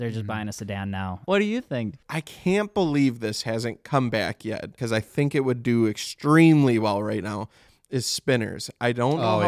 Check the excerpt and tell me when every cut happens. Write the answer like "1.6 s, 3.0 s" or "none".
1.2 s, 2.0 s, 4.8 s